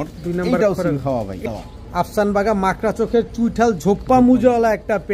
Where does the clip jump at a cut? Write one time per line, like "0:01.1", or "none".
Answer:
0:01.4